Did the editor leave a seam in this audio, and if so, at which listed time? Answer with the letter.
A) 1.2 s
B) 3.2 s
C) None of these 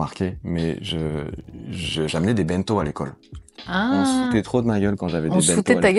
C